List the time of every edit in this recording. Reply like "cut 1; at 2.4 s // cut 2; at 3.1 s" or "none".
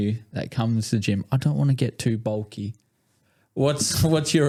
none